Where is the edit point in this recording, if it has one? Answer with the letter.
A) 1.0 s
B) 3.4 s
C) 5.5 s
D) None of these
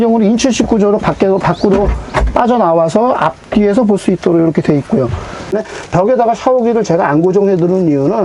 C